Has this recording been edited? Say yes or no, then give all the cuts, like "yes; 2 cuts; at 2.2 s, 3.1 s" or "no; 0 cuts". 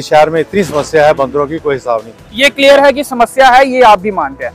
no; 0 cuts